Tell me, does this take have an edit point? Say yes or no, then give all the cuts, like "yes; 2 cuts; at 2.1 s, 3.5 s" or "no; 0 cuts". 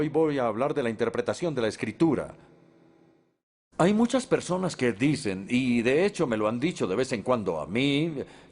yes; 1 cut; at 2.3 s